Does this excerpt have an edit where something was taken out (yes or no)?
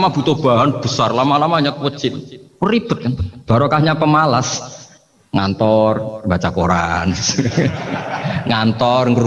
no